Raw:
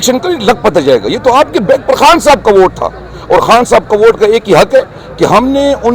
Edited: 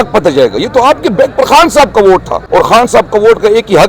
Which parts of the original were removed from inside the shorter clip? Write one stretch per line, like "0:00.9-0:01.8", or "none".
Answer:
0:02.9-0:03.1